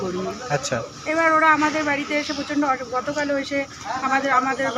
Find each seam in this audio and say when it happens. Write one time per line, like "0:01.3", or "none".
none